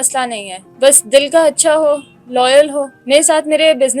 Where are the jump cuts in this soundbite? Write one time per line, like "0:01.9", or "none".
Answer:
0:02.9

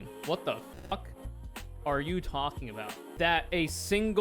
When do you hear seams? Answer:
0:03.0

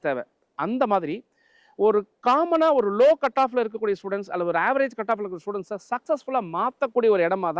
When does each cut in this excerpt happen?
none

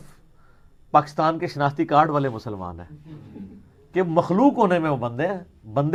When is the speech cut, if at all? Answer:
none

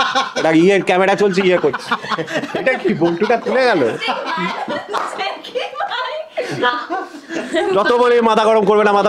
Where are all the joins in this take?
none

